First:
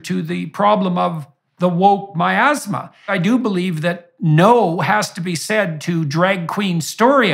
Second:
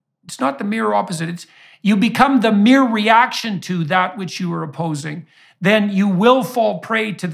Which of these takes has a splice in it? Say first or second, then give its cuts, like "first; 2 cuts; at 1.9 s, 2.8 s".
first; 1 cut; at 3.1 s